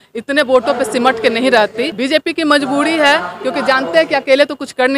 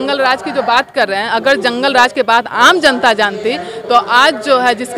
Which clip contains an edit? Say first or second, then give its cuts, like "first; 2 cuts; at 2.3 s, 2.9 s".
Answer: first; 1 cut; at 1.9 s